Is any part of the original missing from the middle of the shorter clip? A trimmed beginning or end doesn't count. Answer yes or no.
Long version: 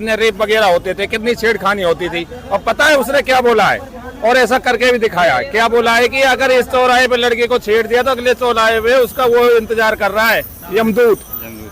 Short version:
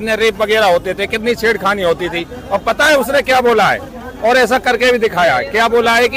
no